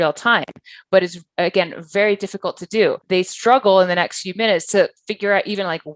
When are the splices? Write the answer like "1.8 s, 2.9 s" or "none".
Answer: 3.0 s

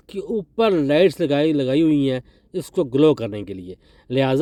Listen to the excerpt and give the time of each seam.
none

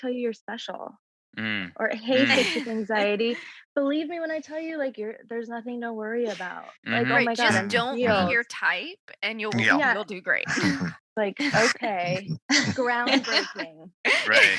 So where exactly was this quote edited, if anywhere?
11.0 s

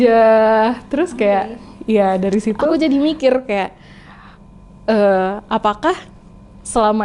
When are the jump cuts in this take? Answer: 2.7 s

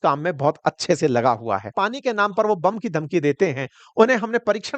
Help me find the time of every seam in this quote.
1.7 s

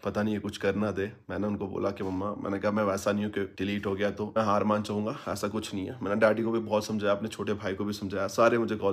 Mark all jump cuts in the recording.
none

